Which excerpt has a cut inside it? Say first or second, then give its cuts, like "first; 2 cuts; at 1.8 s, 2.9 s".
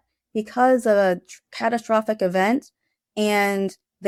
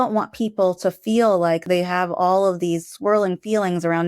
second; 2 cuts; at 1.6 s, 2.9 s